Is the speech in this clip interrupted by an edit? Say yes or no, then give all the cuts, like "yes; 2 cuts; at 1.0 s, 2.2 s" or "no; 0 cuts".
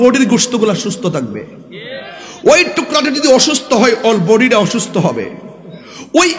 no; 0 cuts